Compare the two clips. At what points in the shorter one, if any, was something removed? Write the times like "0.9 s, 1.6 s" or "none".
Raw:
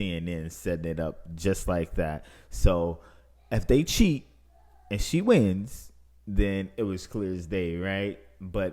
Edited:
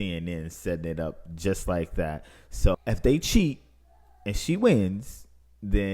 2.8 s

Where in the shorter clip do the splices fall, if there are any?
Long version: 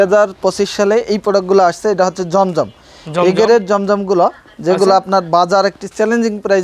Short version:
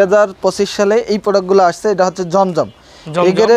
none

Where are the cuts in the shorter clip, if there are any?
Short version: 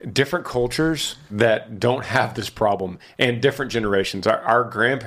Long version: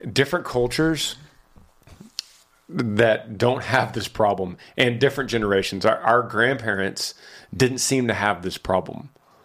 1.3 s

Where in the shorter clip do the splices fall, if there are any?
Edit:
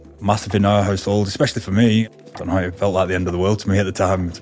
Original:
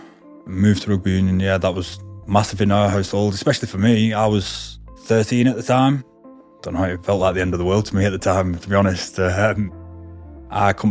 2.1 s

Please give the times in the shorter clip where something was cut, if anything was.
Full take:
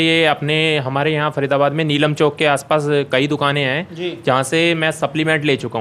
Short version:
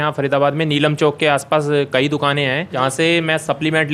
2.7 s

